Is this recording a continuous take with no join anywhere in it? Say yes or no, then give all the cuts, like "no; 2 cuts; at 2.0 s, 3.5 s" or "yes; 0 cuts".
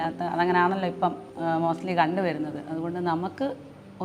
no; 1 cut; at 1.3 s